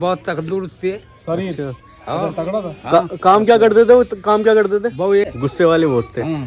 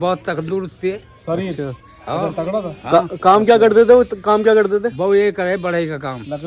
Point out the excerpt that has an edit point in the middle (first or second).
first